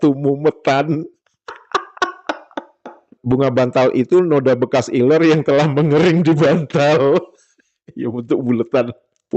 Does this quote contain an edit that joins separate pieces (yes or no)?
yes